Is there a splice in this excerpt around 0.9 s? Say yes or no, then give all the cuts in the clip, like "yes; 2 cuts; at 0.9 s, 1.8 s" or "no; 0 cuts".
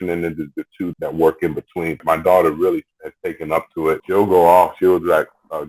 yes; 3 cuts; at 0.9 s, 2.0 s, 4.0 s